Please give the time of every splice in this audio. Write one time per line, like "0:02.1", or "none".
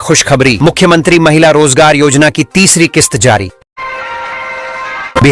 0:03.8